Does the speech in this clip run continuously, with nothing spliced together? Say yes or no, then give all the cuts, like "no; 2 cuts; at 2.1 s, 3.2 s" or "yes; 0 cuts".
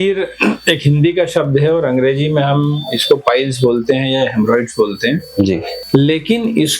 no; 1 cut; at 5.7 s